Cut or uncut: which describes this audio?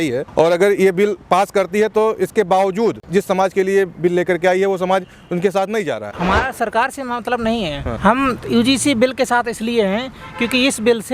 cut